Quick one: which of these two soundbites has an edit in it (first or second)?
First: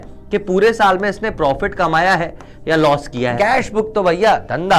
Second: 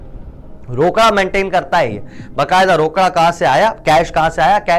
first